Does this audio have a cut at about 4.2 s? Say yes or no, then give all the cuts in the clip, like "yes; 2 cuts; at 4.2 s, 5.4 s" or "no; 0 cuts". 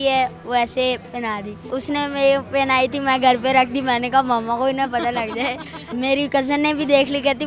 no; 2 cuts; at 1.7 s, 5.9 s